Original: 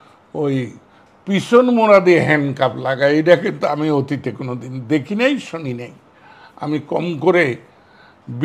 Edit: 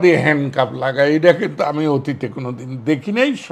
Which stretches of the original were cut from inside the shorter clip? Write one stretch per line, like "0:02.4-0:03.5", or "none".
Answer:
none